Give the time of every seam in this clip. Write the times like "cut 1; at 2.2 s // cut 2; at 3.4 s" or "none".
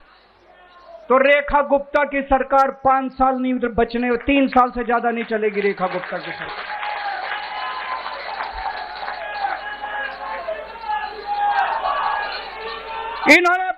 none